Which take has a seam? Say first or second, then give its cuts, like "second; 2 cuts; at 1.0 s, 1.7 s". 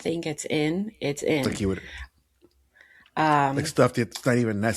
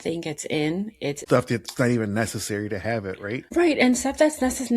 second; 2 cuts; at 1.2 s, 3.5 s